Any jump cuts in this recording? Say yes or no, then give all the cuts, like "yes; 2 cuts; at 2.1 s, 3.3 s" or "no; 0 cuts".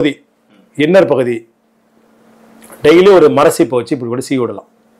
no; 0 cuts